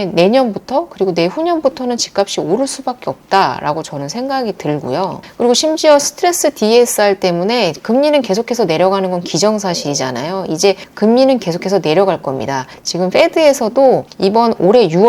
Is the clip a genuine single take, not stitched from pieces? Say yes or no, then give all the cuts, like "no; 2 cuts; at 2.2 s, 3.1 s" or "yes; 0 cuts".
no; 1 cut; at 5.2 s